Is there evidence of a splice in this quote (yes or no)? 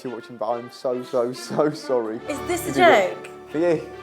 yes